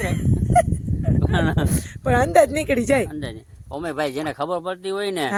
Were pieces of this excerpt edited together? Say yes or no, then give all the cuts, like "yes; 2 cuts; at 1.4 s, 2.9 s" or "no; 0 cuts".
no; 0 cuts